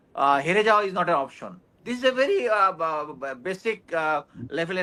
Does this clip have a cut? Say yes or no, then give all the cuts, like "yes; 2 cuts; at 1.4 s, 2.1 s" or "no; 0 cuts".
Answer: no; 0 cuts